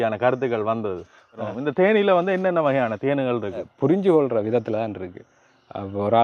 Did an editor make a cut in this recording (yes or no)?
yes